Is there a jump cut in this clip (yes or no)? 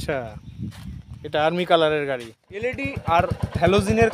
yes